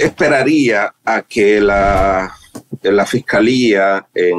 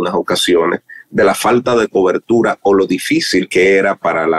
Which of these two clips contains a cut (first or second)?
second